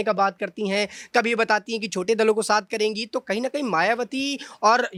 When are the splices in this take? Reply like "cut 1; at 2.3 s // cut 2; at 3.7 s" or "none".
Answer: none